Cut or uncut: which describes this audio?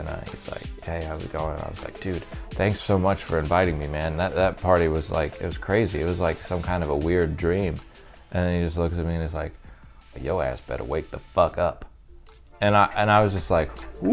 uncut